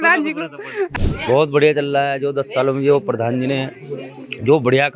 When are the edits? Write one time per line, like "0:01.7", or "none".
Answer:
0:01.0